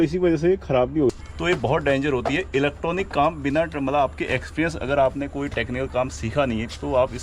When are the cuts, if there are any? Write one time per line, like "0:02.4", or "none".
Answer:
0:01.1